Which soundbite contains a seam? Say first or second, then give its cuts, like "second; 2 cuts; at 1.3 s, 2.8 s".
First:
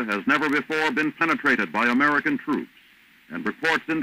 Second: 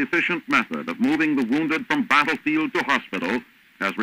first; 1 cut; at 2.4 s